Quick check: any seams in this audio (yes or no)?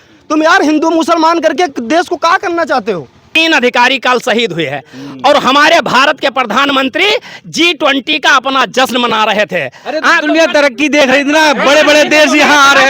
yes